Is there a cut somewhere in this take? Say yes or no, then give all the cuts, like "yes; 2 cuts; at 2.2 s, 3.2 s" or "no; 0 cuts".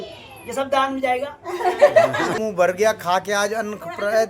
yes; 1 cut; at 2.4 s